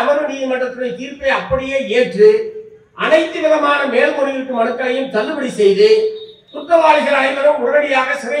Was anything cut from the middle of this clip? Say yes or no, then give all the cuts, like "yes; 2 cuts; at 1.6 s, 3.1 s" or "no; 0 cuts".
no; 0 cuts